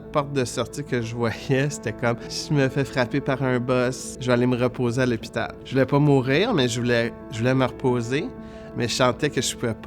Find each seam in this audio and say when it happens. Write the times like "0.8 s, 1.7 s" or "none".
2.3 s, 4.1 s, 5.6 s